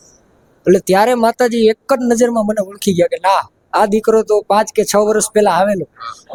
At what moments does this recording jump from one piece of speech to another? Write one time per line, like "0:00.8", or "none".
none